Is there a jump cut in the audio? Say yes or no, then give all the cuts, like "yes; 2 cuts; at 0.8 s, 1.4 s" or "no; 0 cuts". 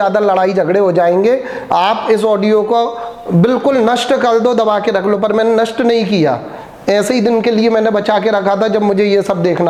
no; 0 cuts